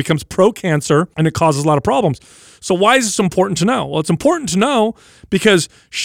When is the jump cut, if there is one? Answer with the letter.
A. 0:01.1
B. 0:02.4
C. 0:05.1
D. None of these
A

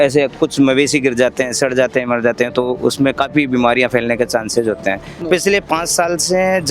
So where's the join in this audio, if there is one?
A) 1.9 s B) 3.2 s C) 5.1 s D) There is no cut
C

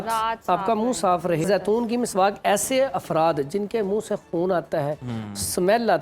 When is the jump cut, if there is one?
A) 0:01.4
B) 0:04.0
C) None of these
A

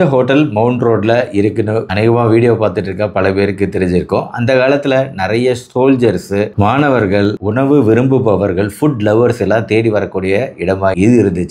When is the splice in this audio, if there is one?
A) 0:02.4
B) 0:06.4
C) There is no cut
C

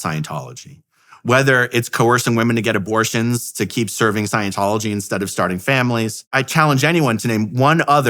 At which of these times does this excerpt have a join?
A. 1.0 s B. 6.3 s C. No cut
B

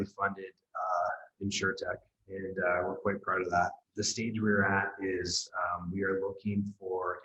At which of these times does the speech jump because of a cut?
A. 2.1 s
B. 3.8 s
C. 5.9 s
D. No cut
B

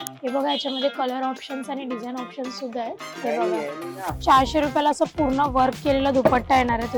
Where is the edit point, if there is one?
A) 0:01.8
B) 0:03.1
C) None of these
B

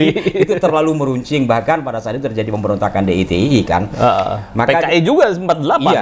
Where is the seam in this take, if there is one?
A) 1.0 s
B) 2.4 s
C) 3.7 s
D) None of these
D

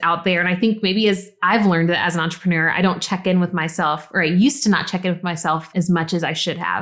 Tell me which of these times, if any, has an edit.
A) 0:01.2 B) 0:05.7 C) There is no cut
B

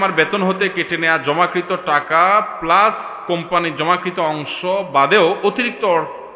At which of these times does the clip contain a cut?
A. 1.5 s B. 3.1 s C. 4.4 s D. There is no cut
D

